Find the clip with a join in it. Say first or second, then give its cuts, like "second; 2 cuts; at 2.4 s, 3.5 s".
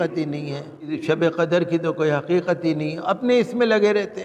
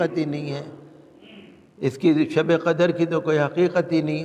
first; 1 cut; at 1.0 s